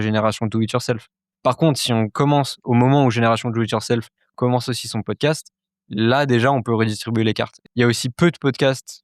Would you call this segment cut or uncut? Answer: cut